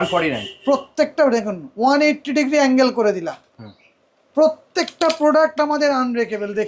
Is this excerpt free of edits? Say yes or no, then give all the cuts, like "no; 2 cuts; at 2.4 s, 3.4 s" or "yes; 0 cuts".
yes; 0 cuts